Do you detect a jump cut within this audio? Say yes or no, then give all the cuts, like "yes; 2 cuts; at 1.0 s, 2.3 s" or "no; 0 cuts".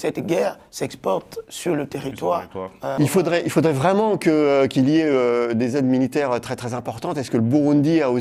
yes; 1 cut; at 2.9 s